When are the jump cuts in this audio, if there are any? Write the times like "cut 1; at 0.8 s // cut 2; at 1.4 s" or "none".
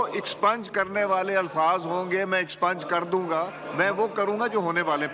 cut 1; at 3.6 s